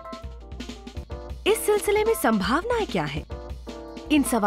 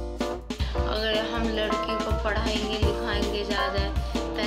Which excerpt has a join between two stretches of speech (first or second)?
first